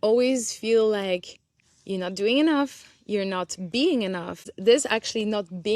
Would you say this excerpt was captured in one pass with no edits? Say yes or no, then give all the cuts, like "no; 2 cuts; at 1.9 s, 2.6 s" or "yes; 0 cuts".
no; 1 cut; at 4.5 s